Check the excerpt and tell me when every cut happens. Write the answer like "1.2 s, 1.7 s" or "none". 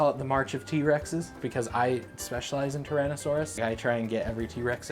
1.4 s, 3.6 s